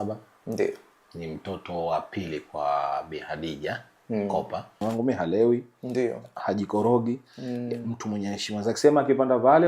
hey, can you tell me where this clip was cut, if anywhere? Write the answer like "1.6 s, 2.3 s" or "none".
4.8 s